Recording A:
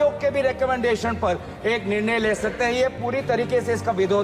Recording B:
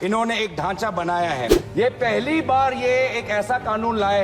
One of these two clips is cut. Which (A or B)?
B